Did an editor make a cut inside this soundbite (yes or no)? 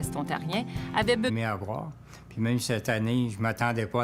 no